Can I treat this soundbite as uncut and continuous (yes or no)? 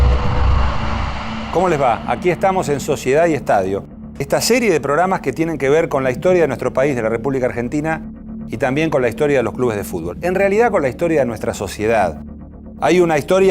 no